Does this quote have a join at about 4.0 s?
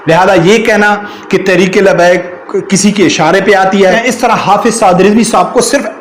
yes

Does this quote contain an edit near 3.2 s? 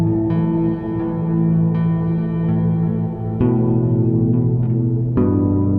no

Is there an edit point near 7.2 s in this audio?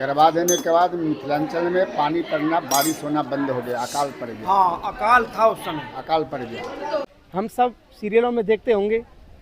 yes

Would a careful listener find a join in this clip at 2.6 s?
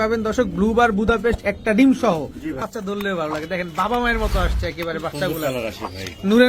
yes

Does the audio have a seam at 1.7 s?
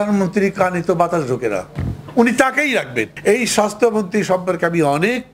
no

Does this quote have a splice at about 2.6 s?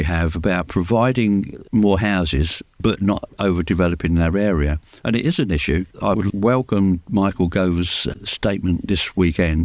yes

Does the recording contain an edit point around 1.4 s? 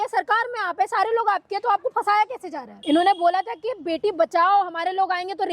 no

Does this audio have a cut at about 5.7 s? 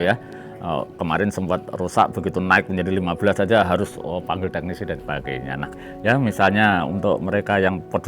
yes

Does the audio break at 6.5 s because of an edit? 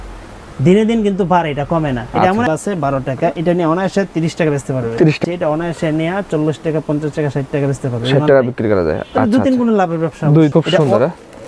no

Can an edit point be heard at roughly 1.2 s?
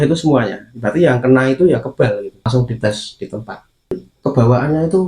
no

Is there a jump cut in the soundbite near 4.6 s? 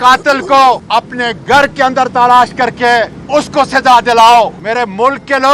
yes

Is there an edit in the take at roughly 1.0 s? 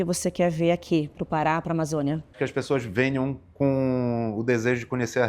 no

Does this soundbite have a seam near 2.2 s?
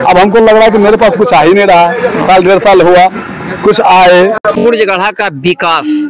no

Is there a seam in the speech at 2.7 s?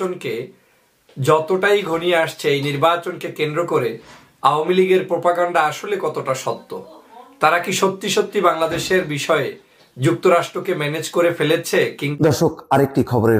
no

